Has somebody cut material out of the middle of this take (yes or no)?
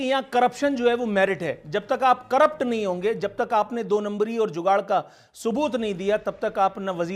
no